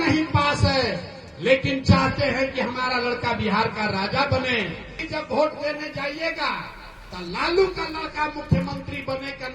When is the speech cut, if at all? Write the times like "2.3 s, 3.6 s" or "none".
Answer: 5.0 s